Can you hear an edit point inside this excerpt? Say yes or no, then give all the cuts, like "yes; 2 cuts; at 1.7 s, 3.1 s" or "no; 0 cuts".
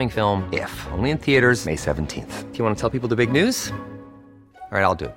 no; 0 cuts